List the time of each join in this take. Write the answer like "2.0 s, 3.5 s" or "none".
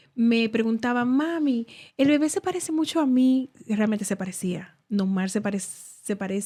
none